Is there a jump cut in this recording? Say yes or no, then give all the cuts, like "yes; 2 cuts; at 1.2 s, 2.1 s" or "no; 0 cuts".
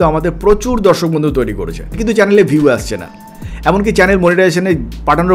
yes; 1 cut; at 1.9 s